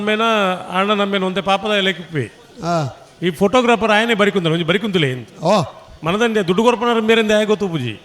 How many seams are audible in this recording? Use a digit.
0